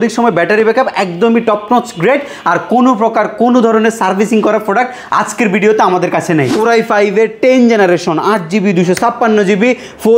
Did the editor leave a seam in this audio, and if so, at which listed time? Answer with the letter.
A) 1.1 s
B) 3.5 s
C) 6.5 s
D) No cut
C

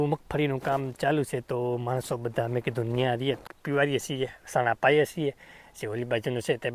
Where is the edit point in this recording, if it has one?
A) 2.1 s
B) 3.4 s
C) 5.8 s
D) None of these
B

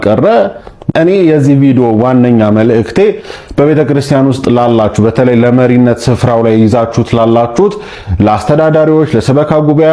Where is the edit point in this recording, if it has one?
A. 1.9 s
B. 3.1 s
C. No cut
C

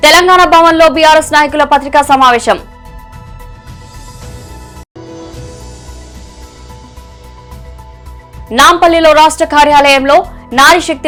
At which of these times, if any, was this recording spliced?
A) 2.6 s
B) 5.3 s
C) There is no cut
C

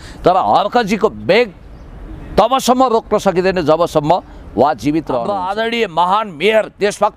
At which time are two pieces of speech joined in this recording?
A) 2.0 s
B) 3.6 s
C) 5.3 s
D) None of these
C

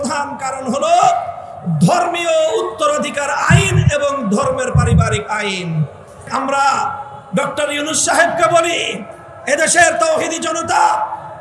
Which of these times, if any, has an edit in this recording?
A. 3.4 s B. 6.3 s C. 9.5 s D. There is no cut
B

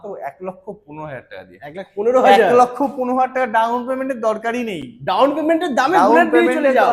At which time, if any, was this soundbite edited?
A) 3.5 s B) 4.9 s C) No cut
C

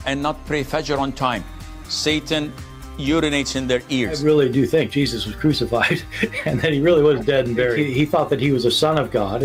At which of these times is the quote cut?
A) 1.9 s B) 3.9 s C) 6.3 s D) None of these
C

